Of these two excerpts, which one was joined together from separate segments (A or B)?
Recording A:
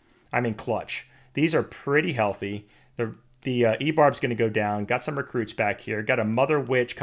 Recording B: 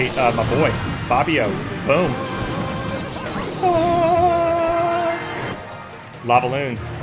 B